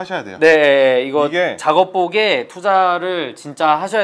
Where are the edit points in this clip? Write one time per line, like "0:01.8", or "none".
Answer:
none

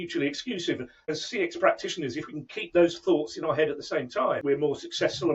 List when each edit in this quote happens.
0:01.1
0:04.4

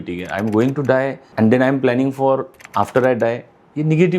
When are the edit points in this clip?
0:01.2
0:02.6

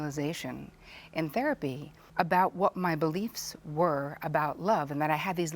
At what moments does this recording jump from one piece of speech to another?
0:01.9

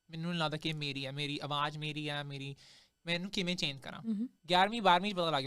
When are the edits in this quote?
0:04.4

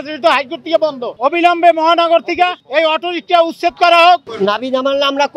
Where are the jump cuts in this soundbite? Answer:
0:01.1
0:02.6
0:04.3

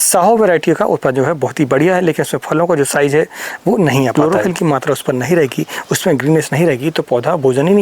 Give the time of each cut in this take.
0:04.1

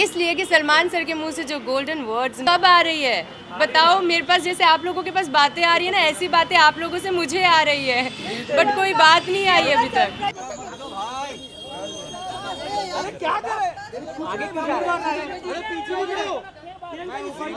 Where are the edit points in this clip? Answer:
0:02.4
0:10.4

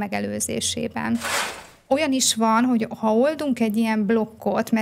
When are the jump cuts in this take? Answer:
0:01.5

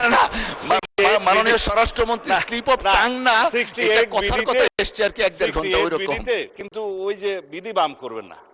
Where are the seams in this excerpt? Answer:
0:06.6

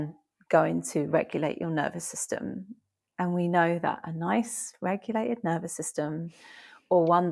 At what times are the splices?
none

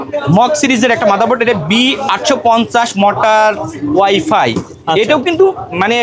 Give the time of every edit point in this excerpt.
none

